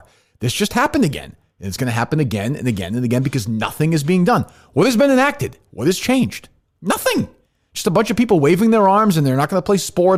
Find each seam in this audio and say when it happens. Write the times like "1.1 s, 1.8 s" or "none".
none

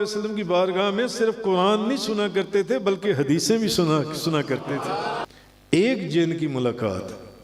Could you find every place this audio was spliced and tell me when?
5.2 s

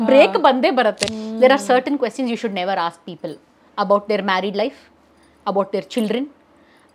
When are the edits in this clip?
1.1 s

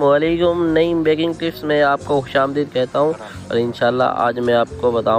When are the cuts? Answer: none

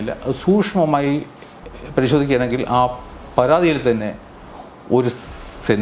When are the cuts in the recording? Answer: none

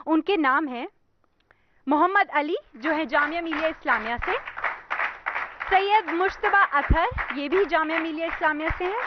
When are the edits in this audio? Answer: 0.9 s

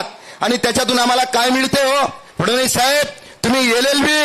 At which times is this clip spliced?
2.3 s

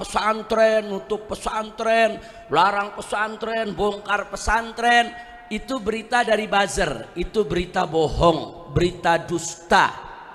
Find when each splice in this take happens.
none

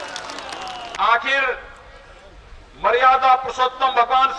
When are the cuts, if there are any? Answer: 0.9 s

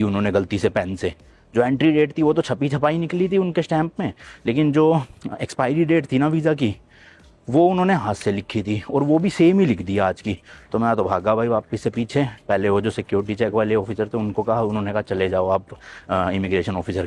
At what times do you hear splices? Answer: none

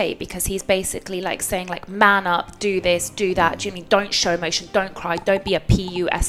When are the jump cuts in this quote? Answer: none

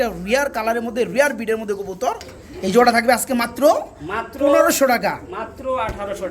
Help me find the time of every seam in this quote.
2.3 s

